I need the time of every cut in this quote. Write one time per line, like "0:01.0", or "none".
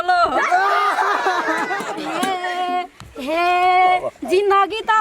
none